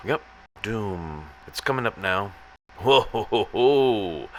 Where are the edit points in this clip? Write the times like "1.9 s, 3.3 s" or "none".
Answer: none

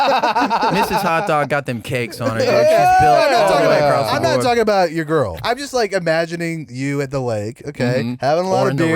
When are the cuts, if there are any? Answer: 5.4 s

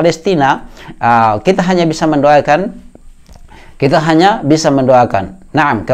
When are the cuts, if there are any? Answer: none

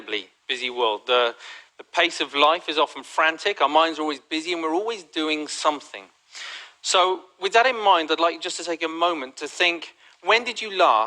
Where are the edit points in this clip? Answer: 1.4 s

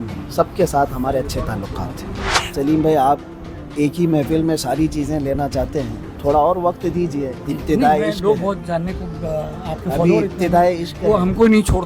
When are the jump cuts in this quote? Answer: 2.3 s

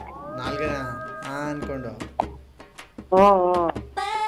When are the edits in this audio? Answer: none

